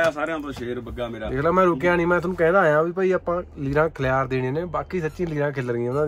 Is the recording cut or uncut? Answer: uncut